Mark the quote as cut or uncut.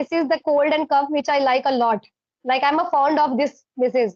uncut